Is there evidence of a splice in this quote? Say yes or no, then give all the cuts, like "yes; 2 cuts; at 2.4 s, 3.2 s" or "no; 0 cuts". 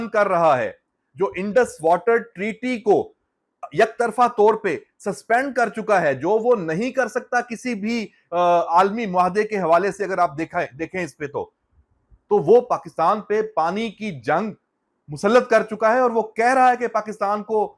no; 0 cuts